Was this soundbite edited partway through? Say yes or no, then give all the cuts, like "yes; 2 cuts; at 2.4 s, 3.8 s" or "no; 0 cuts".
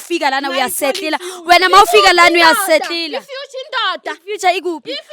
no; 0 cuts